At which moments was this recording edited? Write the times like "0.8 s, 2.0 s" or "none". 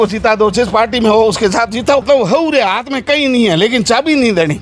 2.0 s